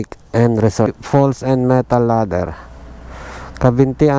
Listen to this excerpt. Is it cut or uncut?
cut